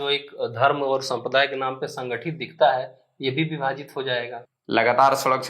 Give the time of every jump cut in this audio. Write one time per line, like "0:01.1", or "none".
0:04.4